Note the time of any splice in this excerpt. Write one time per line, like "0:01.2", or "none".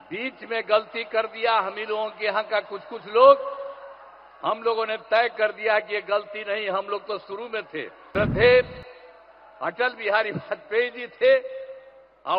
0:08.0